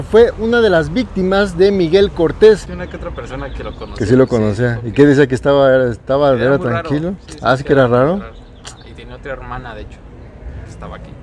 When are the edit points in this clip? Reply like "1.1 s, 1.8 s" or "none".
2.8 s